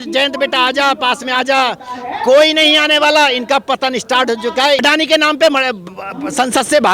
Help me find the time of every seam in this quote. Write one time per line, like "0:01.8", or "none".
0:04.8